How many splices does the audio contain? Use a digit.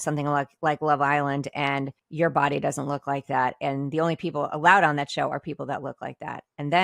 1